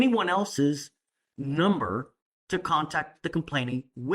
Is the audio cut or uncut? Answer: uncut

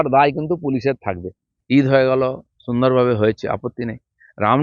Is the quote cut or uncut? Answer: cut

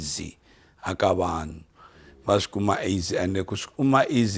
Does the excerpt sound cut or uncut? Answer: uncut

